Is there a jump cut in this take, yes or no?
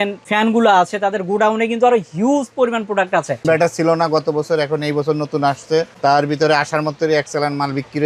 yes